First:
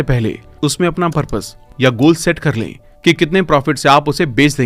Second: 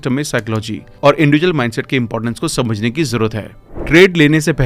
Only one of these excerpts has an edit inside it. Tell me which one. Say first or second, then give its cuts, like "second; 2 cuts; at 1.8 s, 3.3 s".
second; 1 cut; at 3.6 s